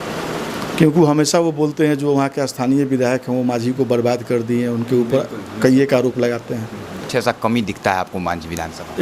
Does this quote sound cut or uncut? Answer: cut